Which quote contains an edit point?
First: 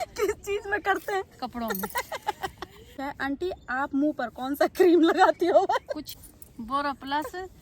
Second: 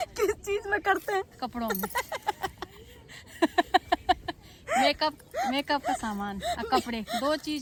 first; 2 cuts; at 2.9 s, 6.1 s

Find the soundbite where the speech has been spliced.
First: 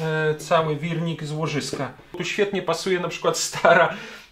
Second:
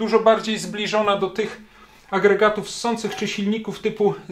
first; 1 cut; at 2.2 s

